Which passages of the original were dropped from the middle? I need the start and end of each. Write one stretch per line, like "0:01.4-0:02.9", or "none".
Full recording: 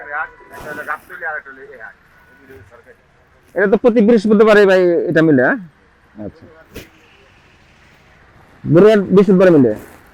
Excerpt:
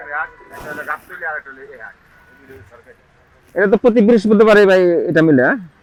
none